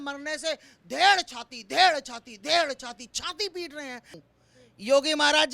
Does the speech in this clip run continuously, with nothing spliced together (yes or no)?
no